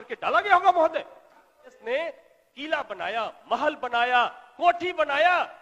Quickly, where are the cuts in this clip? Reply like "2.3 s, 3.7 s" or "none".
1.8 s